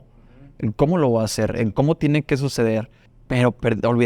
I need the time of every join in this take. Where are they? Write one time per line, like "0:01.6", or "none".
none